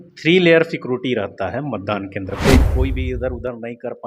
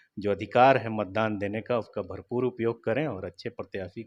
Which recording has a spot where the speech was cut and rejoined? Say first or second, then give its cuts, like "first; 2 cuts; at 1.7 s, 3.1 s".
first; 1 cut; at 2.6 s